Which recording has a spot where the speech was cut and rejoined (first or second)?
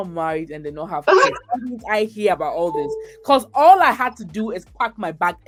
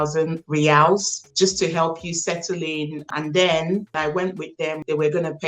second